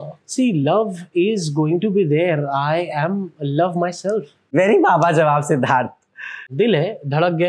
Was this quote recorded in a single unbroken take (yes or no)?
no